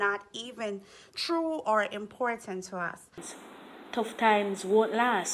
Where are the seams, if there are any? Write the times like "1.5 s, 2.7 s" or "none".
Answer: 3.3 s